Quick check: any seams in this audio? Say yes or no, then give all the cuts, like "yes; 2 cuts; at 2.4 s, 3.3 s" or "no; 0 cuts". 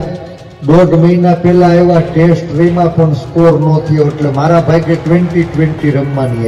no; 0 cuts